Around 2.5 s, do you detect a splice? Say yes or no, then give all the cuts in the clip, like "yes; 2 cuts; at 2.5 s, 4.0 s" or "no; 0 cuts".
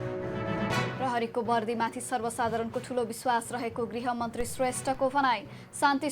no; 1 cut; at 0.9 s